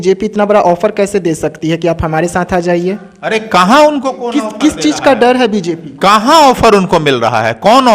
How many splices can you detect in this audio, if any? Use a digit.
0